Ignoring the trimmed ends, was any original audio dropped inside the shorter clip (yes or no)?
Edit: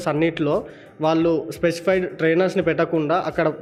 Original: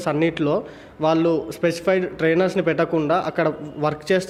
no